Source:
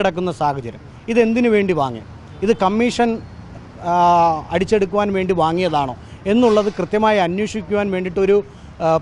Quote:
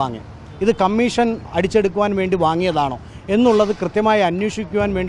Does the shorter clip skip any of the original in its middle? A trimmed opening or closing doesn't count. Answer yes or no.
yes